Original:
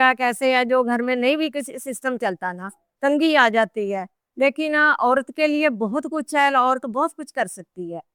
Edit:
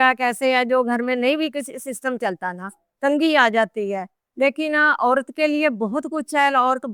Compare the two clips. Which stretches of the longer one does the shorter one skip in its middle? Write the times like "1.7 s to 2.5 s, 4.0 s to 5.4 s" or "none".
none